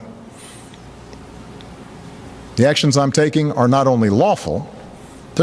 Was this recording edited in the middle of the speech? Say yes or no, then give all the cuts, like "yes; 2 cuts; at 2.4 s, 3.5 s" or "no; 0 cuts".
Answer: no; 0 cuts